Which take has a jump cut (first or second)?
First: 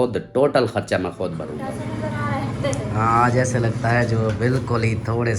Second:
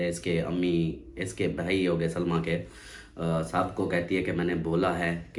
first